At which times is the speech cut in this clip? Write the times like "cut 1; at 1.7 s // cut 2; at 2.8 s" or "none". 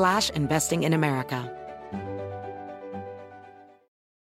cut 1; at 1.4 s